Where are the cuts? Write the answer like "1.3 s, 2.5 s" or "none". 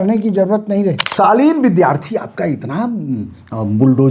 1.0 s